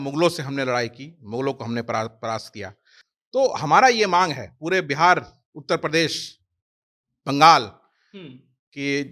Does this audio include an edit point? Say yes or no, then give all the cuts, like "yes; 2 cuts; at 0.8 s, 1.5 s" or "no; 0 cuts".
no; 0 cuts